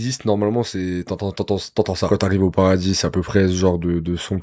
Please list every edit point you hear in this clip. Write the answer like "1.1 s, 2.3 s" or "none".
2.1 s